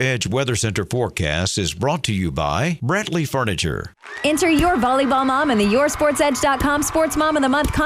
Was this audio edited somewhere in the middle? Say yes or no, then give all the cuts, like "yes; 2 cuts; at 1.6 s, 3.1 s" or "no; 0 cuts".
no; 0 cuts